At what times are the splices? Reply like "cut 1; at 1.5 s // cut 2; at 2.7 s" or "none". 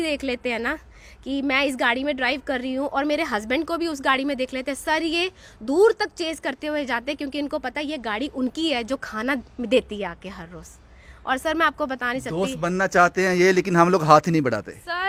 none